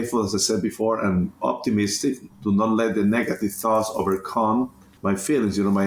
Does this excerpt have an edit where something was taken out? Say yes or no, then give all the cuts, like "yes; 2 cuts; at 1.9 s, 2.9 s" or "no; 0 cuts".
yes; 1 cut; at 4.9 s